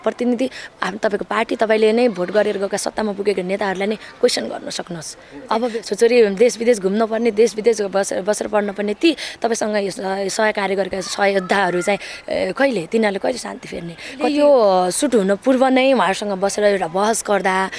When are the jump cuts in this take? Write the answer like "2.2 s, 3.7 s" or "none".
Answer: 5.7 s, 14.3 s